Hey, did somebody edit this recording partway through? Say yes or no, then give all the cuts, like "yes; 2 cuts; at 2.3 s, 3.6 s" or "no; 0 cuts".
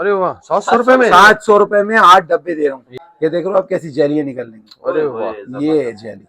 yes; 1 cut; at 3.0 s